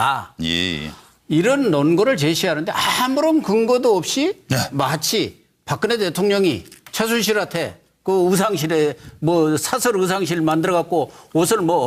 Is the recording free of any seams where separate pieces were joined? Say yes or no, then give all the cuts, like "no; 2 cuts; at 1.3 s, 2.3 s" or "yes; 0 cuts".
no; 1 cut; at 1.8 s